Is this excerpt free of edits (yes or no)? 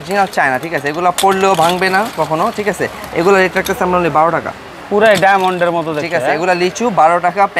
yes